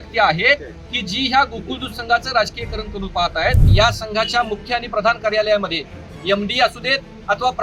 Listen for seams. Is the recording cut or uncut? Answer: cut